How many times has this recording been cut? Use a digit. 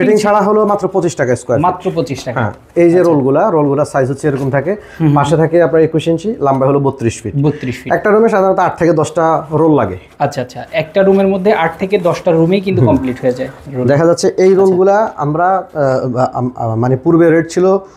0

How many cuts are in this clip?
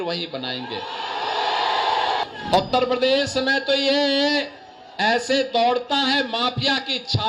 1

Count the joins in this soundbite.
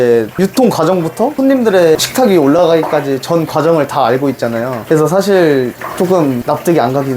3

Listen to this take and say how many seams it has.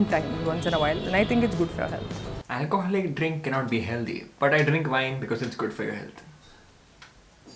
1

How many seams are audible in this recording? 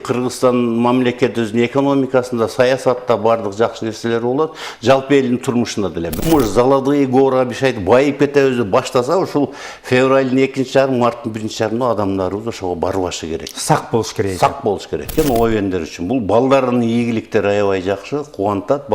2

